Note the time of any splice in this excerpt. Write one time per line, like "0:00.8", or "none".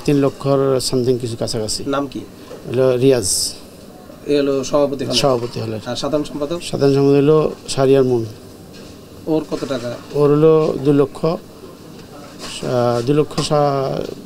none